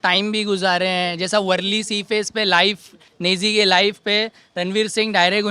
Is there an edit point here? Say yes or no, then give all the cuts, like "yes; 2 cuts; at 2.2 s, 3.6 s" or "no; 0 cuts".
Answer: no; 0 cuts